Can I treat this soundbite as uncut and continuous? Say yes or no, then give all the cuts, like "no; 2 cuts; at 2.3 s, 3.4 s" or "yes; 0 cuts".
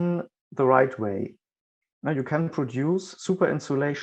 yes; 0 cuts